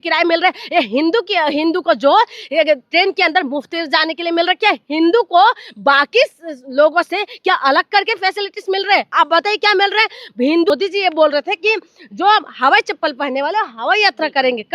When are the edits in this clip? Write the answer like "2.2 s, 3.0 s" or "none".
10.7 s